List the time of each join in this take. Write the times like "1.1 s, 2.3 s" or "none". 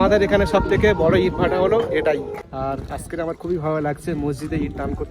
2.4 s